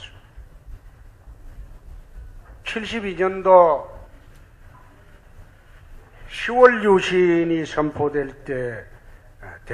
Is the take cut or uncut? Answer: cut